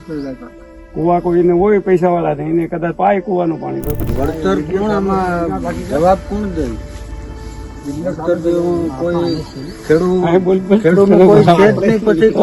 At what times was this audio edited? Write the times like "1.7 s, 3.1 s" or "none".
4.1 s